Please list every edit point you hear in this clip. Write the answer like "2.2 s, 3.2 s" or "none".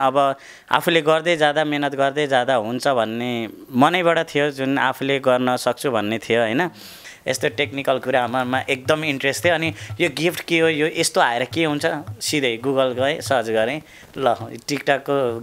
7.1 s